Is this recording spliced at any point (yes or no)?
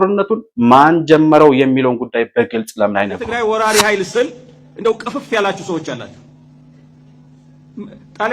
yes